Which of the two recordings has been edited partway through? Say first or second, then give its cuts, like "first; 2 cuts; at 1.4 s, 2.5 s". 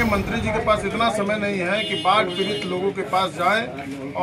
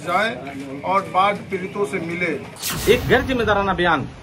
second; 1 cut; at 2.6 s